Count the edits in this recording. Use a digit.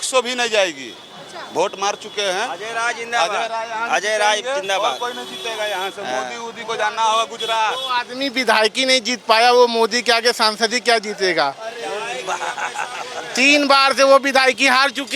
0